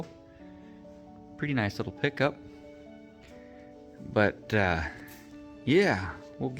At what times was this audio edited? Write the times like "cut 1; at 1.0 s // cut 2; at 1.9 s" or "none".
cut 1; at 2.6 s // cut 2; at 4.0 s